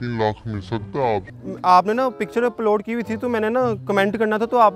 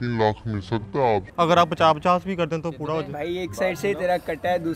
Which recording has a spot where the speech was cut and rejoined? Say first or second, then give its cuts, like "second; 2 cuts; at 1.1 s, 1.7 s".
first; 1 cut; at 1.3 s